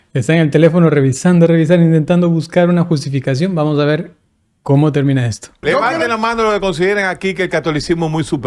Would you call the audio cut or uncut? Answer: cut